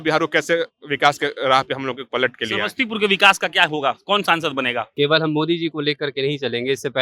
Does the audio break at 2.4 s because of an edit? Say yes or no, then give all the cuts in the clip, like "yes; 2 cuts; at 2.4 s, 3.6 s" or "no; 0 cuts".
no; 1 cut; at 4.9 s